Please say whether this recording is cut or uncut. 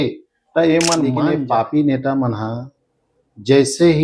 cut